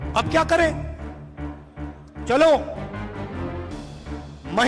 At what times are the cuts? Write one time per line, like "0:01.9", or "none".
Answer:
none